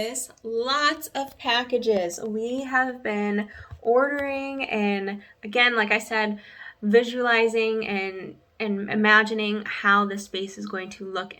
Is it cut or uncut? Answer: uncut